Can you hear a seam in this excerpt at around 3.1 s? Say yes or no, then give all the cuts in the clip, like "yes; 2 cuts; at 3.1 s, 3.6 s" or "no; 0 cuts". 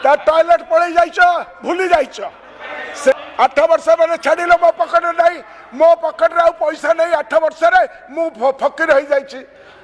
yes; 1 cut; at 3.1 s